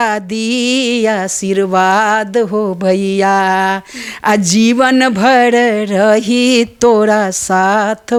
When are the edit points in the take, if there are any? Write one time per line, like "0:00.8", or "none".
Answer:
none